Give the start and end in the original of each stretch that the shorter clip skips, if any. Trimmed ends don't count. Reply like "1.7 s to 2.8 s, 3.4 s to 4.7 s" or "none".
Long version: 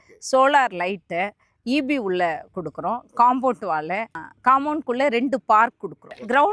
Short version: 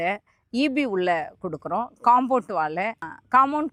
none